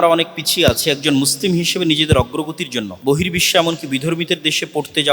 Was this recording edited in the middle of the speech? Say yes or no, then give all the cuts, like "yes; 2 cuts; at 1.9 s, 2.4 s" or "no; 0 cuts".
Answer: yes; 1 cut; at 2.9 s